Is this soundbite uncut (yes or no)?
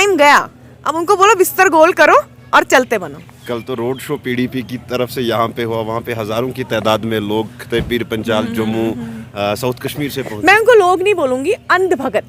yes